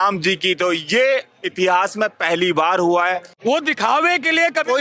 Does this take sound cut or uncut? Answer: cut